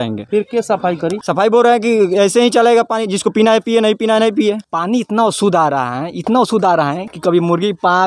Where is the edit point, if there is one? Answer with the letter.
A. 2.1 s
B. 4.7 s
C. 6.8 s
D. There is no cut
B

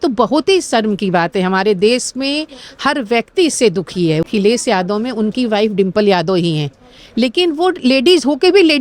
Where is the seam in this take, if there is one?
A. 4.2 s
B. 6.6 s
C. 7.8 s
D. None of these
A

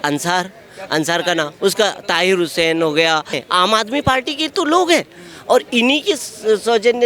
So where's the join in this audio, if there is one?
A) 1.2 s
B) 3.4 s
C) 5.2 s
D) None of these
B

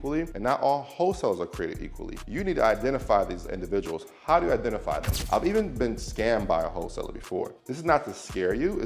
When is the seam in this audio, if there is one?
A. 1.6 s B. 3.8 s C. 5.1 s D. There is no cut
C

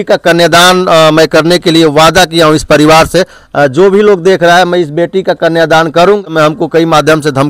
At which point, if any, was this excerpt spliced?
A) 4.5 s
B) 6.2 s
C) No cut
B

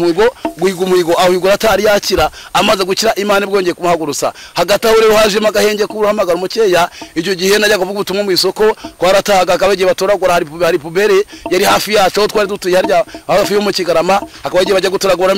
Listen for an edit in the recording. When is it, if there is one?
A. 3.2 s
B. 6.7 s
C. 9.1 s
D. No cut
D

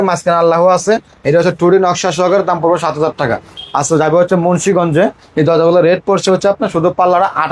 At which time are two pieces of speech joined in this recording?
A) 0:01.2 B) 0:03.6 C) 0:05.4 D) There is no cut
B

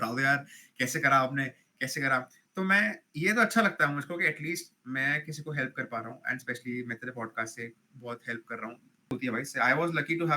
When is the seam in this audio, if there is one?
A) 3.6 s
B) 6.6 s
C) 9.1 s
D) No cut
C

